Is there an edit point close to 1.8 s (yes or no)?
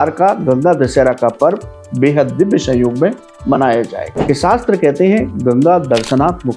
no